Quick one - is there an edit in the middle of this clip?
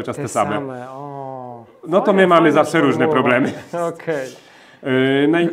no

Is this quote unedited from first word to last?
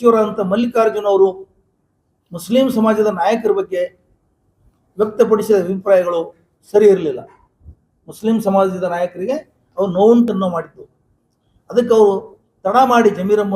yes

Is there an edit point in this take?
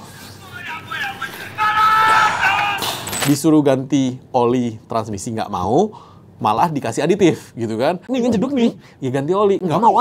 yes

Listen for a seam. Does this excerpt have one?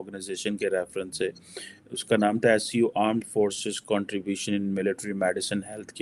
no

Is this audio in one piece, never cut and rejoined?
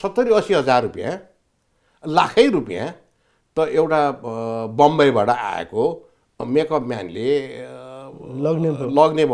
yes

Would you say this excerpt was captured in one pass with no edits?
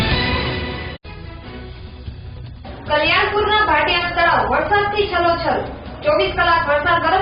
no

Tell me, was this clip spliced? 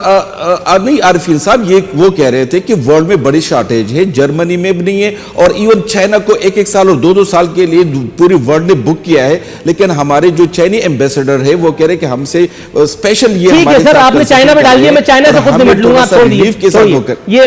no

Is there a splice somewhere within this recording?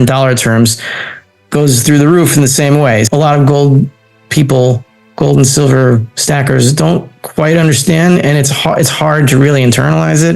yes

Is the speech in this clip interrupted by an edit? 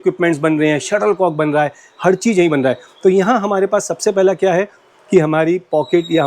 no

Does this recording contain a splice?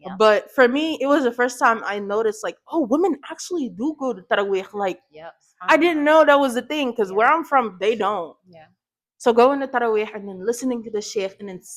no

